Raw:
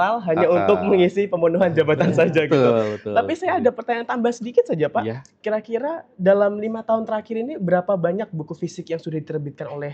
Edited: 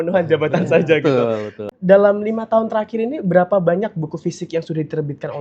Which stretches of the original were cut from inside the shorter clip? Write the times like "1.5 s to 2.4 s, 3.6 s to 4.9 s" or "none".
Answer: 3.1 s to 6.0 s